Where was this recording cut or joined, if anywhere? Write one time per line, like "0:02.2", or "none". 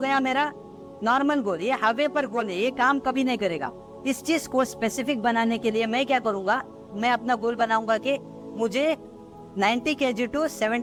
none